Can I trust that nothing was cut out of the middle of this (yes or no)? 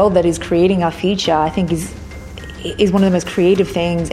yes